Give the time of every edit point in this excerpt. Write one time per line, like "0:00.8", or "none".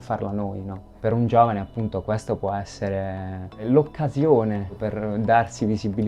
none